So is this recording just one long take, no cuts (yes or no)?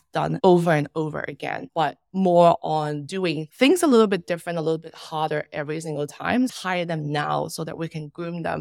no